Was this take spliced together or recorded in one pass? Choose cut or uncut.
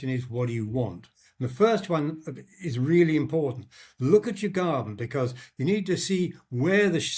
uncut